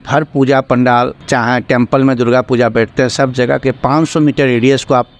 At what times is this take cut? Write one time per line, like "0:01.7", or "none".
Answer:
0:01.2

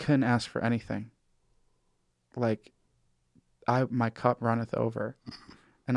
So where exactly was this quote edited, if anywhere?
none

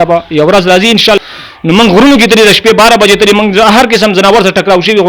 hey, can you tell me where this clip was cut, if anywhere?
0:01.2

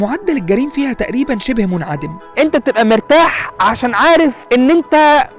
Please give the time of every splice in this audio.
0:02.3
0:04.4

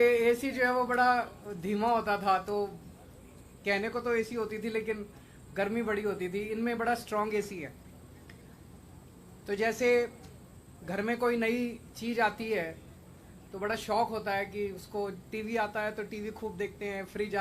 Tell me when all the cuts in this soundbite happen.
0:08.3

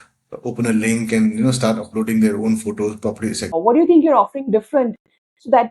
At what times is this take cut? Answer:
0:03.5

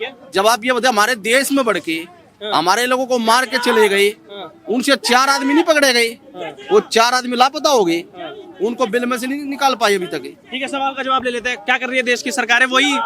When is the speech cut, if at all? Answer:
none

